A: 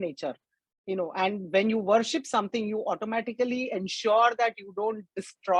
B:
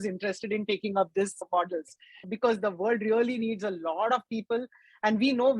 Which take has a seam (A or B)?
B